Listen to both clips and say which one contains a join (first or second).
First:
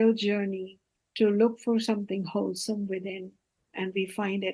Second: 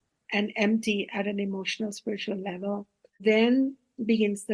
second